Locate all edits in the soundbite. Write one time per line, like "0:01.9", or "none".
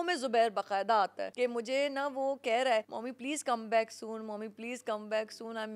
0:01.2
0:03.0